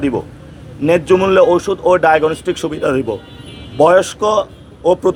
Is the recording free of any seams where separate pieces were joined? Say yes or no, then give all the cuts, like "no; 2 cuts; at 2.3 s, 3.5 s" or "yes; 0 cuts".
yes; 0 cuts